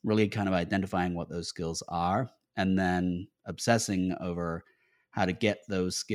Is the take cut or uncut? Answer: uncut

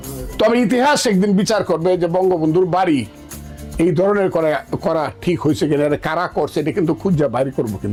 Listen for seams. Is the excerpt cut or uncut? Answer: uncut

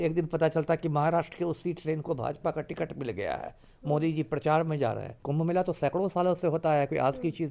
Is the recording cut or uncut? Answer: cut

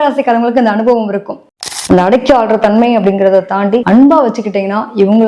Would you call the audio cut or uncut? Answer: cut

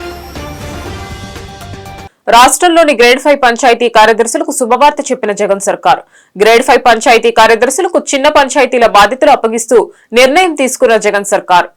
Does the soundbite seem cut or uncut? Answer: uncut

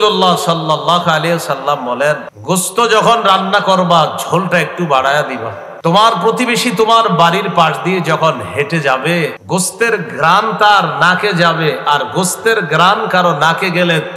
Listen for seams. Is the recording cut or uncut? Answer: cut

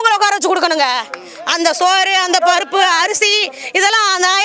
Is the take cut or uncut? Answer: uncut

